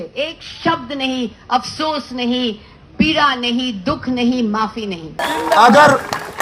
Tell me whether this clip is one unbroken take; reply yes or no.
no